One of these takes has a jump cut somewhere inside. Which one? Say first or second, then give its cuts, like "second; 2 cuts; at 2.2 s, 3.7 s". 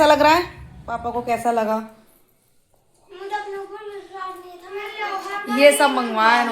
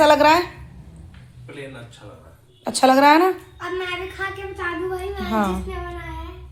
first; 2 cuts; at 1.2 s, 5.0 s